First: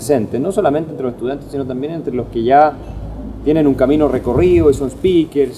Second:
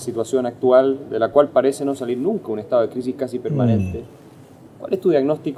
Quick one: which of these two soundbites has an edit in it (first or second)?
first